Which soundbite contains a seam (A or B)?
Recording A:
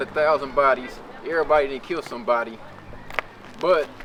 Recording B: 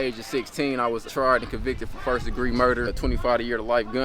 B